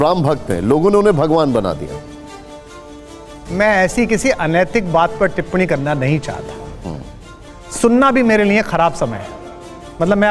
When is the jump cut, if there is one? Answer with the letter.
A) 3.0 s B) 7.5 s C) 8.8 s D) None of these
B